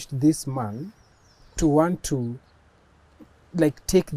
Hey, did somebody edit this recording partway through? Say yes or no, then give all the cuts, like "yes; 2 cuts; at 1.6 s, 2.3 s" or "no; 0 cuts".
no; 0 cuts